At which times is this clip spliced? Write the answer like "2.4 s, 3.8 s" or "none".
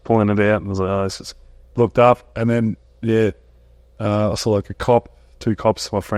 none